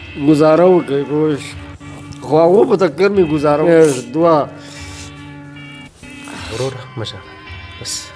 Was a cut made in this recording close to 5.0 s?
no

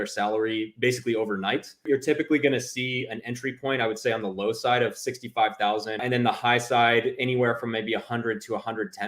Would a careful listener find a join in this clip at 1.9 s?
yes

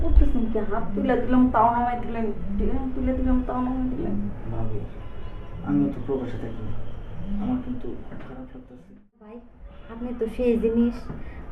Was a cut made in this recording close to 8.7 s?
yes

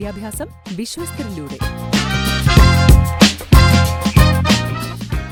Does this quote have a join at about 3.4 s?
no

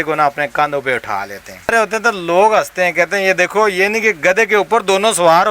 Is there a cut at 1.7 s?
yes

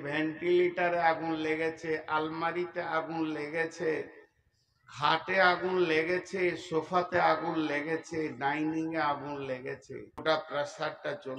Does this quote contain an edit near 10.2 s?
yes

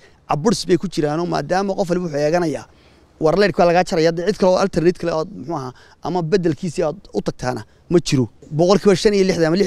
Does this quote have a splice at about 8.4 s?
yes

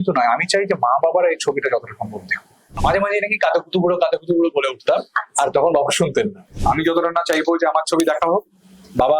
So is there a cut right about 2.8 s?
yes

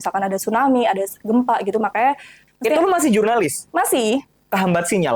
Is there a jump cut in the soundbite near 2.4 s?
yes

